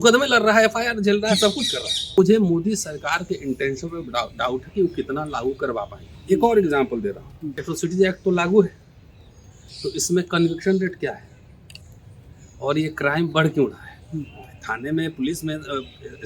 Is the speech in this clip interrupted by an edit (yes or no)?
yes